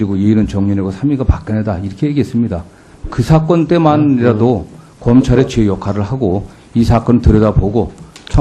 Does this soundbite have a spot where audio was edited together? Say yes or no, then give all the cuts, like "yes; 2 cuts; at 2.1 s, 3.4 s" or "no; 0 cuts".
yes; 1 cut; at 1.2 s